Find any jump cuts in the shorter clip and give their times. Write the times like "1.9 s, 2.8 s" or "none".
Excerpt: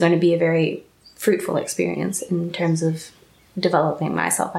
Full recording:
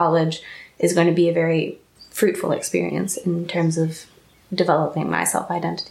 none